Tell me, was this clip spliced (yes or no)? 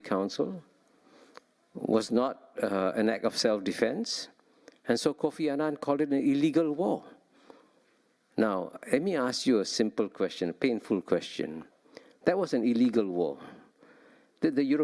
no